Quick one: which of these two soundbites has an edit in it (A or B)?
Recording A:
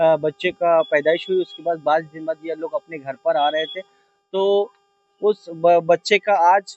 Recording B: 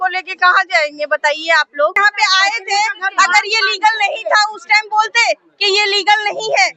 B